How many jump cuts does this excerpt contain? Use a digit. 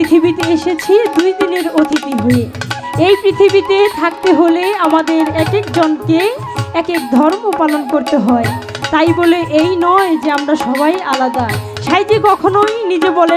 0